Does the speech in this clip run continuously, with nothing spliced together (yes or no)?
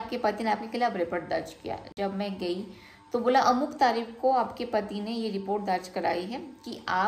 yes